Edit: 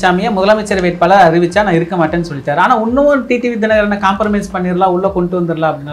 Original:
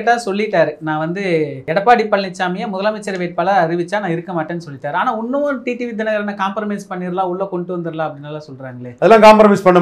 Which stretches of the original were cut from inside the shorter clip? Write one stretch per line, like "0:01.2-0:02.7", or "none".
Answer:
none